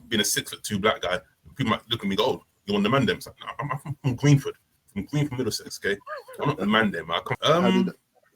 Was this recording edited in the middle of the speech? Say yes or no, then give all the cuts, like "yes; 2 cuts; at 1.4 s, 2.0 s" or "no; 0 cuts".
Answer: yes; 1 cut; at 7.3 s